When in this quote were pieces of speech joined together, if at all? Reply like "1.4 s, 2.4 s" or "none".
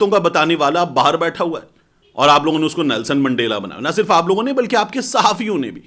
none